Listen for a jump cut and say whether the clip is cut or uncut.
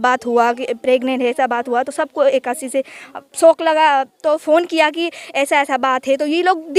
uncut